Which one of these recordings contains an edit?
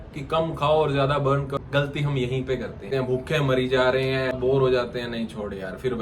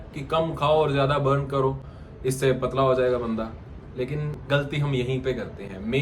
first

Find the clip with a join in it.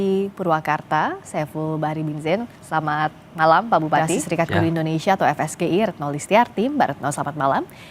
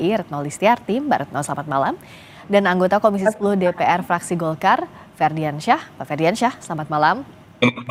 first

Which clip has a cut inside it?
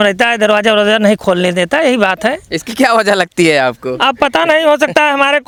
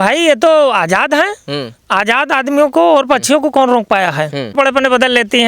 second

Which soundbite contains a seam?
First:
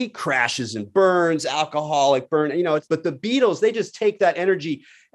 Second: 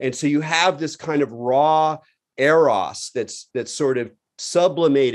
first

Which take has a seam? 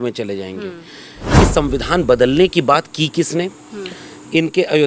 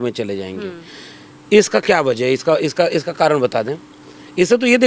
first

